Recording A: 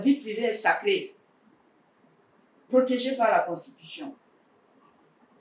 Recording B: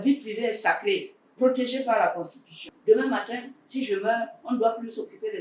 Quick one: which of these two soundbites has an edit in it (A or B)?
B